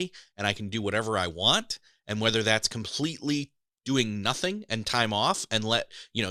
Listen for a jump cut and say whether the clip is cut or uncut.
uncut